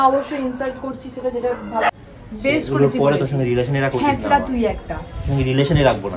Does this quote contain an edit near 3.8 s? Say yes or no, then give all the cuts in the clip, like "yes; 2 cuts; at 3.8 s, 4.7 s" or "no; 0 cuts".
no; 1 cut; at 1.9 s